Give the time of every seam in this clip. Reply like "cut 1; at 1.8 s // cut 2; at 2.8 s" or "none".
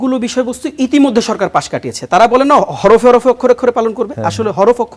none